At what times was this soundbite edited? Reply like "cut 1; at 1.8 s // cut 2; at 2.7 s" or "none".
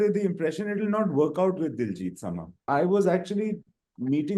cut 1; at 2.6 s